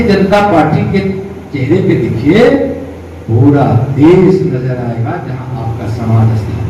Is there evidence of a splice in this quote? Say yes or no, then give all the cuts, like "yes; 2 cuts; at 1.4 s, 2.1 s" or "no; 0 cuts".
no; 0 cuts